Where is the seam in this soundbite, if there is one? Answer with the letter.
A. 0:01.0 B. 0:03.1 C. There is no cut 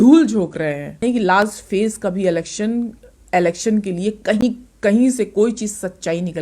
A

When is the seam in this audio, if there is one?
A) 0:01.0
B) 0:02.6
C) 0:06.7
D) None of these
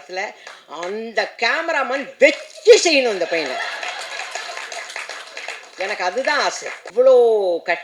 C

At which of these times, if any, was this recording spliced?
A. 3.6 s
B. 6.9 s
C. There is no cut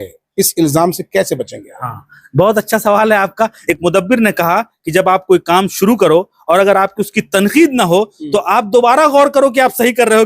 A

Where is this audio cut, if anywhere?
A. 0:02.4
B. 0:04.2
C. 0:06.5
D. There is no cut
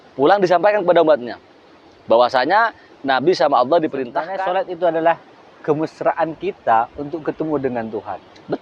B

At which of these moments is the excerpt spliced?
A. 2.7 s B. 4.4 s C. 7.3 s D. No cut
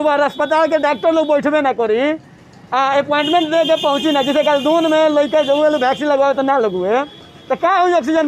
D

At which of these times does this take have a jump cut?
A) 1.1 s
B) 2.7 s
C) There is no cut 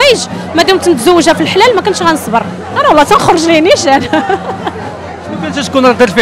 C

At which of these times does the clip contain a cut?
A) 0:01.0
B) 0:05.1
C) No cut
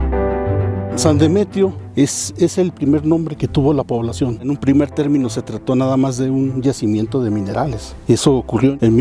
A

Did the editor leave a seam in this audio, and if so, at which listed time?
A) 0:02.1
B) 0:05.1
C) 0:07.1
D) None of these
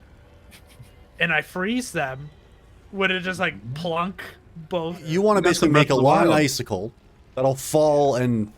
B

